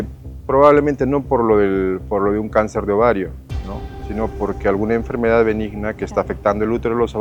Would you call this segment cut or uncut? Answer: uncut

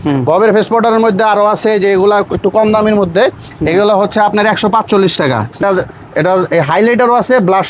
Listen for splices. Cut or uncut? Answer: cut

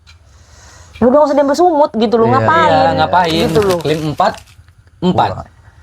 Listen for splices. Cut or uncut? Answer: cut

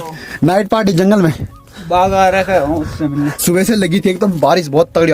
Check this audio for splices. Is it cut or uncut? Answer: cut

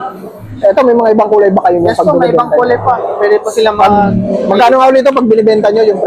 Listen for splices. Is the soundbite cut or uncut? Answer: uncut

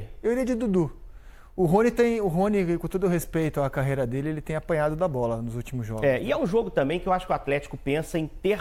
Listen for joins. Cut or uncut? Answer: uncut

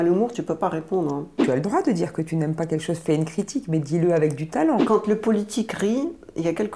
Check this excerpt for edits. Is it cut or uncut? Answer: cut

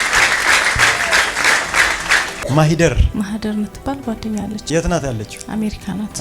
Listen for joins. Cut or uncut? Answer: cut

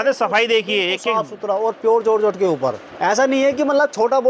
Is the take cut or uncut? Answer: uncut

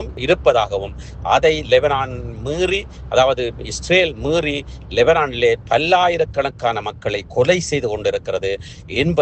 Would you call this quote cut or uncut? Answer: uncut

